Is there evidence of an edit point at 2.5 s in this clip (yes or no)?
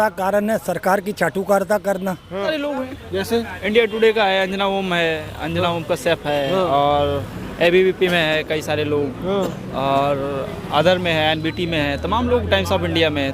yes